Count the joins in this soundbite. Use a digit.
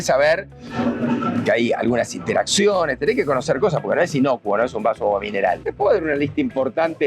1